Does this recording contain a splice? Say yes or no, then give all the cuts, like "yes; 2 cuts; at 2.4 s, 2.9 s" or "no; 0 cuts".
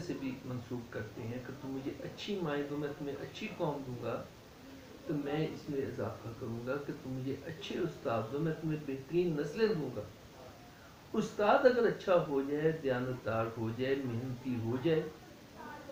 no; 0 cuts